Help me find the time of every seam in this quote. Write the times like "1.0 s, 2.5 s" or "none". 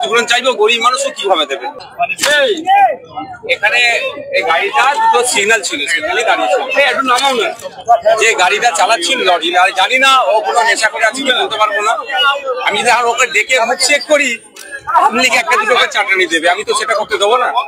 1.7 s